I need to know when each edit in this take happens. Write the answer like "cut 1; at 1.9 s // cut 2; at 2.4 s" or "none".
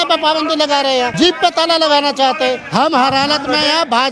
cut 1; at 1.1 s // cut 2; at 2.6 s